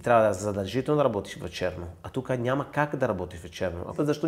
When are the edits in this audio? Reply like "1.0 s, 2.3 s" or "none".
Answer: none